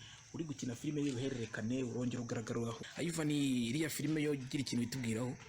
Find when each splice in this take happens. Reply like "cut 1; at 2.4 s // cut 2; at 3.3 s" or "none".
cut 1; at 2.8 s